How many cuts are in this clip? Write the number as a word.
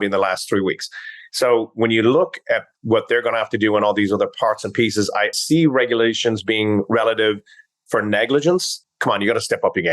two